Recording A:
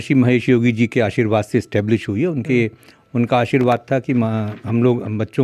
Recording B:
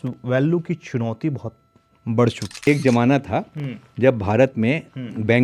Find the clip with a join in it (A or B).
B